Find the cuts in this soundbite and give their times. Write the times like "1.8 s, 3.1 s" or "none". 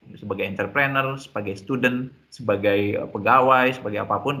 none